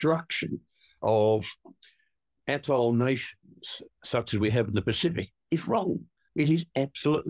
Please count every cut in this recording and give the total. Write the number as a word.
one